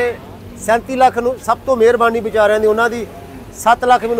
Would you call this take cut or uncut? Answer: uncut